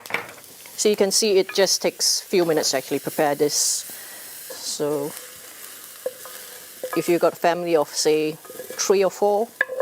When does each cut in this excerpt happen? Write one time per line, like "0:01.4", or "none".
0:04.3